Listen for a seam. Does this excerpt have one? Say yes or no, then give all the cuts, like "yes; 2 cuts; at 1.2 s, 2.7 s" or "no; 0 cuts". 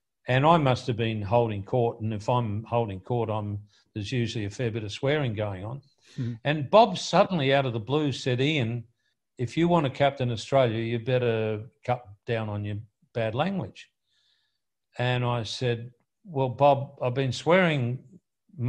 no; 0 cuts